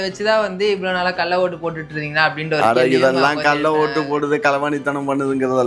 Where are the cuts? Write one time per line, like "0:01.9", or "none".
none